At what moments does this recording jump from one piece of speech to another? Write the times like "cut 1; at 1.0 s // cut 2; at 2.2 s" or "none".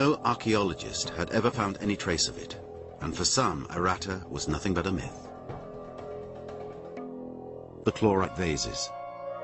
cut 1; at 7.6 s

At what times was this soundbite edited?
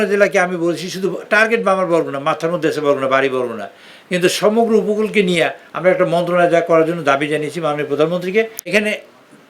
cut 1; at 8.6 s

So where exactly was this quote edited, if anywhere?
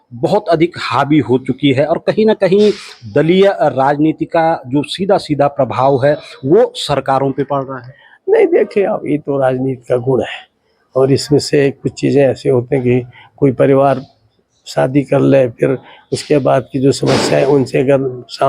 none

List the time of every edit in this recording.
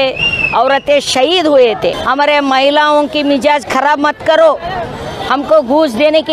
cut 1; at 2.0 s

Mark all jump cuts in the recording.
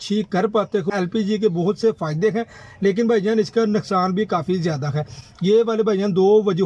cut 1; at 0.9 s // cut 2; at 5.1 s

